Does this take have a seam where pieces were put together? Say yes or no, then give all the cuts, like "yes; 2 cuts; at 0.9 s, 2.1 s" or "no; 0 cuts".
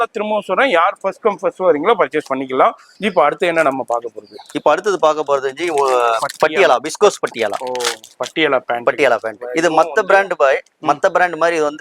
no; 0 cuts